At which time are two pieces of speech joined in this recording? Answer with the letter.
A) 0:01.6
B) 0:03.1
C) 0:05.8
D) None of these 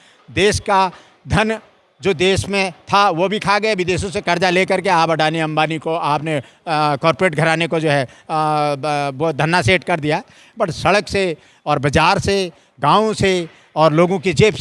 D